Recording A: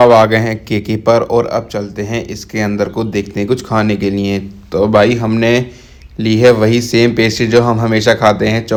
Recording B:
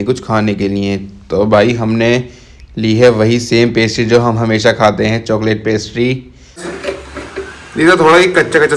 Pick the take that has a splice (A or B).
B